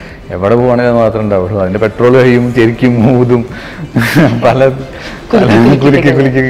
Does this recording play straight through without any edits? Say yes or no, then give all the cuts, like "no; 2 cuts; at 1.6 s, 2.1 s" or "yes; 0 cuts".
yes; 0 cuts